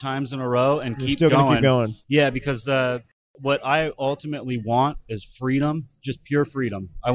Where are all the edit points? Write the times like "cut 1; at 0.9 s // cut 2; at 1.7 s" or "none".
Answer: none